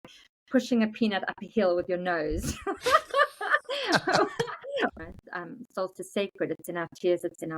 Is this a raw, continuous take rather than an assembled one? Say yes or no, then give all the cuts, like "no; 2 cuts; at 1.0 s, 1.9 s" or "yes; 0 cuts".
no; 1 cut; at 4.9 s